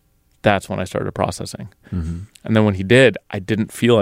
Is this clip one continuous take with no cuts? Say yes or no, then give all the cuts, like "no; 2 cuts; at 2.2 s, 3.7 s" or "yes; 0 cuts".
no; 1 cut; at 1.8 s